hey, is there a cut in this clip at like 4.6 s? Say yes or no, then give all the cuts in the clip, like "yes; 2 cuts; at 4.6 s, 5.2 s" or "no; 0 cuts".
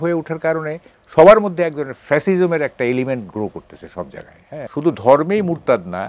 yes; 1 cut; at 4.6 s